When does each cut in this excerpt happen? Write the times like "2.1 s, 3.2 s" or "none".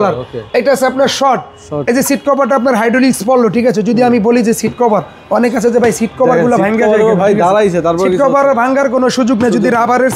none